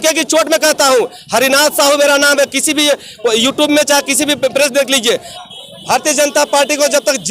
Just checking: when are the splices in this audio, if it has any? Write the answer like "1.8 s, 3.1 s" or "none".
5.3 s